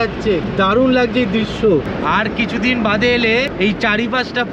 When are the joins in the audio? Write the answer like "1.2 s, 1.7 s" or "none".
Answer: none